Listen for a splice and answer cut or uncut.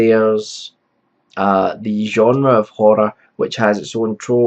cut